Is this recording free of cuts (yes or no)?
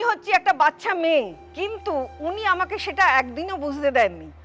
no